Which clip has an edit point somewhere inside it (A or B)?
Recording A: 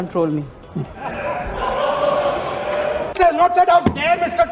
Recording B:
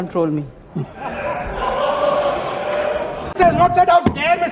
A